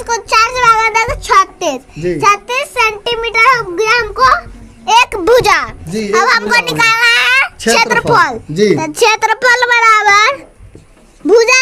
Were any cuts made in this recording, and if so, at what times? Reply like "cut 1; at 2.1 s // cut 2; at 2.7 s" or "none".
none